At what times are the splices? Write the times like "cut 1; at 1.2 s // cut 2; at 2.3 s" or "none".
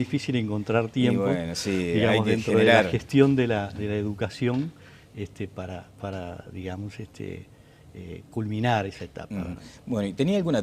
cut 1; at 2.6 s